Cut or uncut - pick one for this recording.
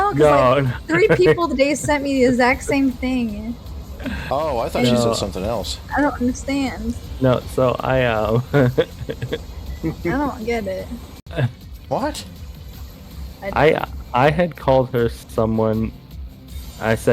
cut